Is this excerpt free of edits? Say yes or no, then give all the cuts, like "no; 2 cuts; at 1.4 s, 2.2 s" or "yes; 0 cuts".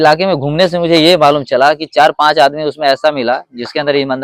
yes; 0 cuts